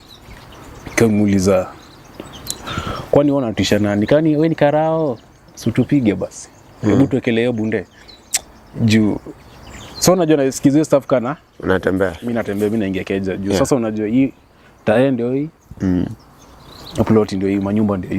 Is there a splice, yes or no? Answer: no